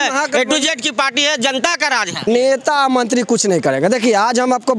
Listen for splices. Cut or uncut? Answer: cut